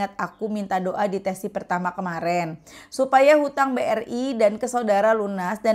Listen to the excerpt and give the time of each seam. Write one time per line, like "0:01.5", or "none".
none